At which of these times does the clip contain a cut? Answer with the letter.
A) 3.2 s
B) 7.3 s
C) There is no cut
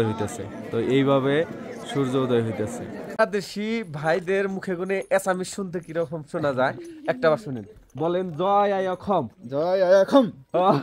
A